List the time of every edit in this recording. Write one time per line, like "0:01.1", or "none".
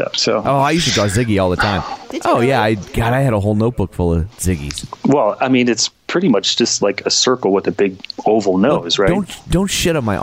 0:02.0
0:04.3

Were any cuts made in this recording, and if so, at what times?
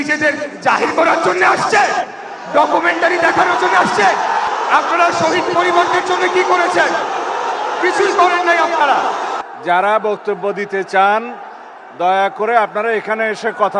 0:04.5
0:09.4

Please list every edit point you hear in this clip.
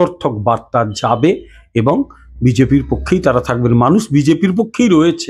none

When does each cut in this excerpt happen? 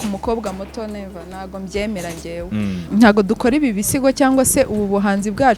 0:02.8

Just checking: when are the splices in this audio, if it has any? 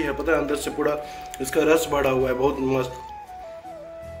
0:03.0

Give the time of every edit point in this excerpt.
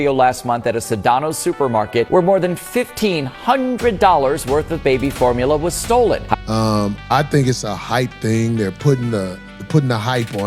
0:06.3

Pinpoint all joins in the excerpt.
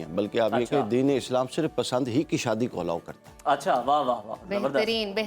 none

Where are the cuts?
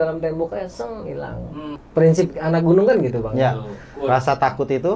0:01.8

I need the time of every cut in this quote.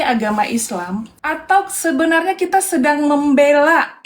0:01.1

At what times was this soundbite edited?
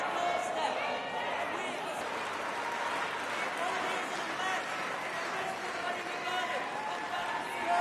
0:02.0

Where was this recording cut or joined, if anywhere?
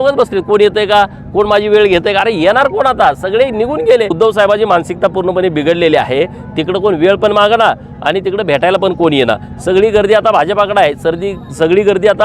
0:04.1

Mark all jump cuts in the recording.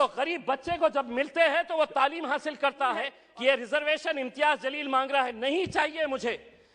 0:03.2

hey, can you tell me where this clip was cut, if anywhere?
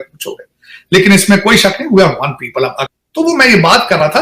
0:02.8

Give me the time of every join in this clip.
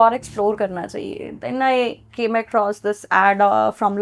none

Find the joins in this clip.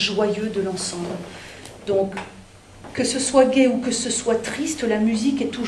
none

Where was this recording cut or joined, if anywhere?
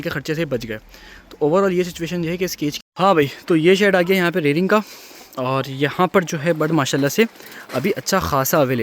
0:02.8

